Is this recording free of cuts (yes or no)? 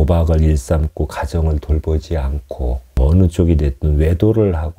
no